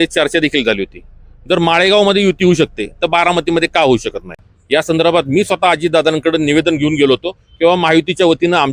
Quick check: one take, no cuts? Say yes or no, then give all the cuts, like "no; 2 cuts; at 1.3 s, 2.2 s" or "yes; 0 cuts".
no; 1 cut; at 4.5 s